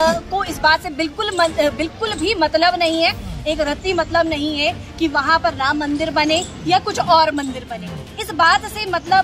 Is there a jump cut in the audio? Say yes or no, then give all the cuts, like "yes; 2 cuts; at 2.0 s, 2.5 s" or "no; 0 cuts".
no; 0 cuts